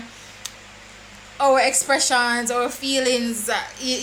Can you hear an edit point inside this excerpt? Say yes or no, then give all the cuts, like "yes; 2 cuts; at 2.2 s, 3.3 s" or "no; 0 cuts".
no; 0 cuts